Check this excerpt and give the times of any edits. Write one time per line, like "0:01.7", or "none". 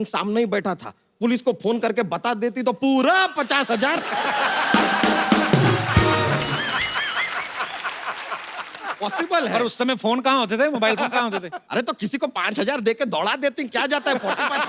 none

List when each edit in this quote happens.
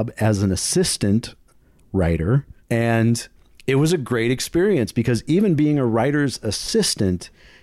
0:02.5

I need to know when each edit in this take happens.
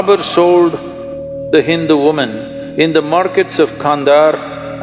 none

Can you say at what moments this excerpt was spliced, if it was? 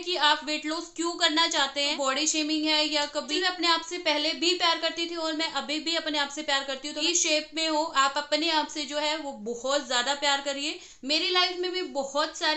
0:01.9
0:03.3
0:07.0
0:10.9

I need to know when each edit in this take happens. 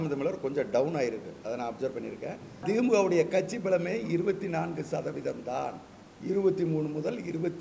0:02.6

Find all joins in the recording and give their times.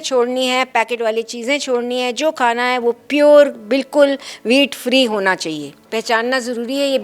0:05.8

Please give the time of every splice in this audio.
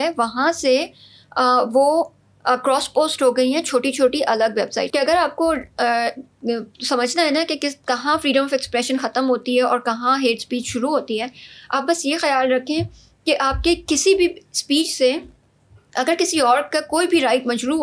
0:04.8

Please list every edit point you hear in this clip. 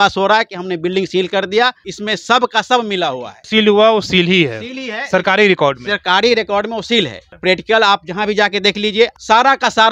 0:01.8
0:03.3
0:07.2
0:09.1

